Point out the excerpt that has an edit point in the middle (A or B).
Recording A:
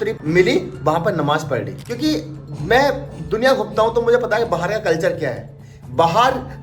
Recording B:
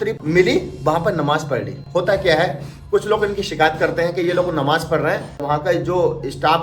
B